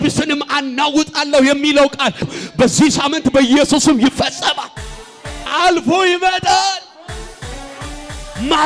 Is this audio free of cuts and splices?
no; 2 cuts; at 2.3 s, 5.5 s

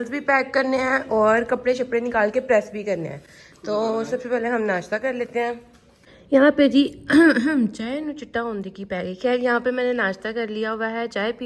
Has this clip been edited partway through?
no; 0 cuts

